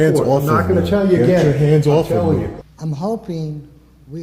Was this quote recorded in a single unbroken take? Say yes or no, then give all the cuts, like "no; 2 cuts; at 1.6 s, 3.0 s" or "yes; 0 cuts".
no; 1 cut; at 2.6 s